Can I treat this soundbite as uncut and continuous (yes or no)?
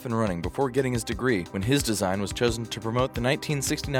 no